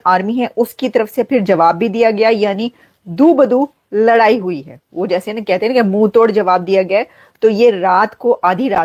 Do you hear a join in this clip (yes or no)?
no